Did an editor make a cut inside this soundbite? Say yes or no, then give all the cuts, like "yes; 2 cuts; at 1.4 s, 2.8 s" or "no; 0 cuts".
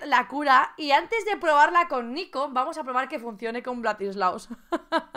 no; 0 cuts